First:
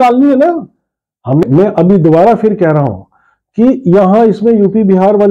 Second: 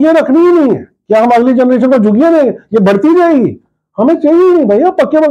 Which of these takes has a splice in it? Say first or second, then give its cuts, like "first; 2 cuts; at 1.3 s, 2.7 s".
first; 1 cut; at 1.4 s